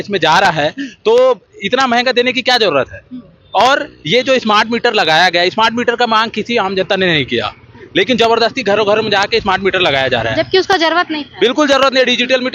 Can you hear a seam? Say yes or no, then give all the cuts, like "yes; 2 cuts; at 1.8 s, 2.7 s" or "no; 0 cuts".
no; 0 cuts